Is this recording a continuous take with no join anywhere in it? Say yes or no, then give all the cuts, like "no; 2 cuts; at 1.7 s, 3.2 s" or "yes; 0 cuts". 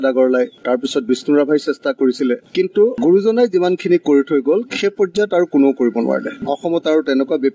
no; 1 cut; at 6.4 s